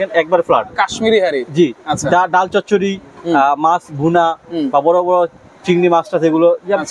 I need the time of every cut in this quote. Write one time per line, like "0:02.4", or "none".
none